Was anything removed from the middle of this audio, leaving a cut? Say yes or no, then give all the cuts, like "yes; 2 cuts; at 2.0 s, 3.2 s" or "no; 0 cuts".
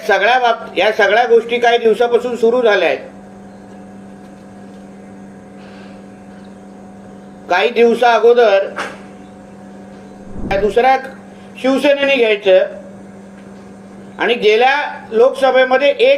yes; 1 cut; at 10.5 s